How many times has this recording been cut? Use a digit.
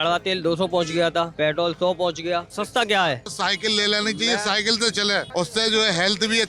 4